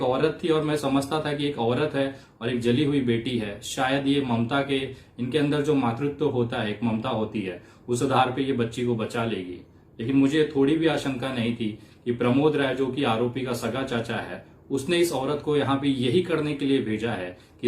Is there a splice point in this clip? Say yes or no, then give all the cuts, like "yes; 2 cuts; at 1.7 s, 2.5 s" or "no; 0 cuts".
no; 0 cuts